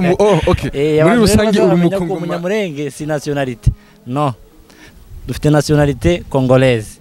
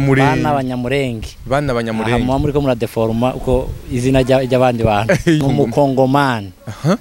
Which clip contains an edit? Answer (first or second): second